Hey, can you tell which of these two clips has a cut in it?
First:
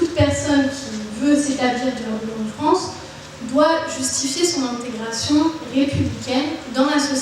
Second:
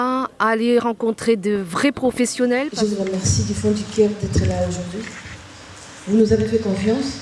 second; 1 cut; at 2.7 s

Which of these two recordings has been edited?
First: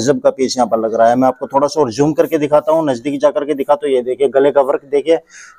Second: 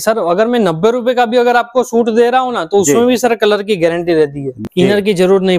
second; 1 cut; at 4.5 s

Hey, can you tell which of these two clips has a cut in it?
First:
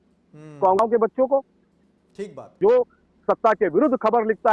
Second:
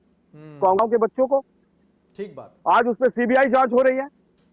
first; 1 cut; at 2.5 s

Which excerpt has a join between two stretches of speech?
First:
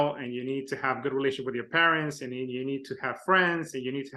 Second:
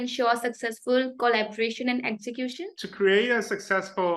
second; 1 cut; at 2.5 s

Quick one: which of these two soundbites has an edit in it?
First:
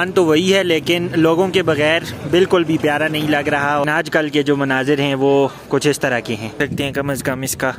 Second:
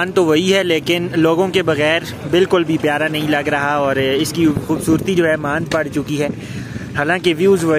first; 2 cuts; at 3.8 s, 6.6 s

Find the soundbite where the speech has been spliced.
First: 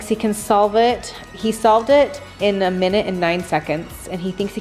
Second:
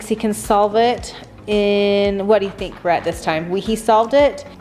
first; 1 cut; at 1.3 s

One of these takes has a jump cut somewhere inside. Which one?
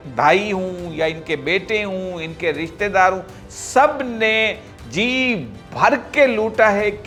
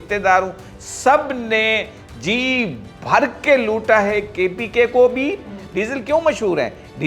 second; 1 cut; at 5.7 s

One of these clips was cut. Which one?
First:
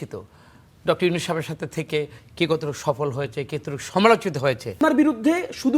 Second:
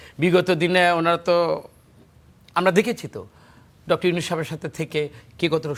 first; 1 cut; at 4.7 s

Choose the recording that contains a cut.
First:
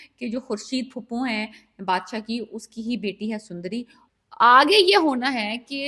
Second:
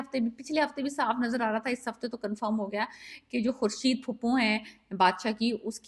first; 1 cut; at 4.0 s

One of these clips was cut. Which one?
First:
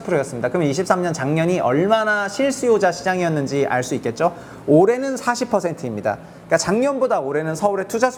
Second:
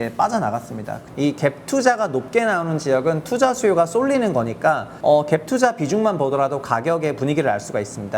second; 2 cuts; at 1.0 s, 4.9 s

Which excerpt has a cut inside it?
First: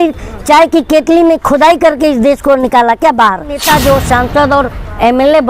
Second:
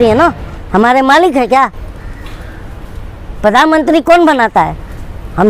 first; 1 cut; at 3.6 s

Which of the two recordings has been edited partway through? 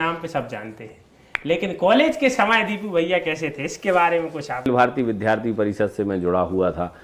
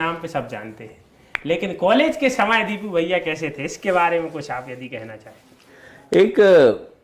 first; 1 cut; at 4.7 s

